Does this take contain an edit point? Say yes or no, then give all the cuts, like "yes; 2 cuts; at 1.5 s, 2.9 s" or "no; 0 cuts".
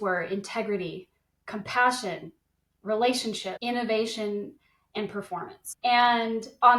yes; 2 cuts; at 3.5 s, 5.6 s